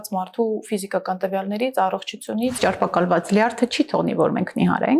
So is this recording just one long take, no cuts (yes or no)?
no